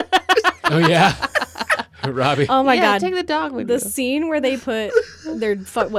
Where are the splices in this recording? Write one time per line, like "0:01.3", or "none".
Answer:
none